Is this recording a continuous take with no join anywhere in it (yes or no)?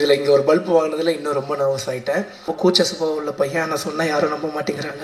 no